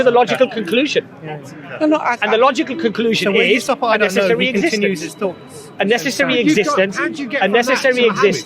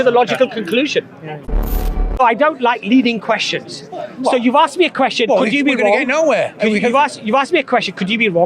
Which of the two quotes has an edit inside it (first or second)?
second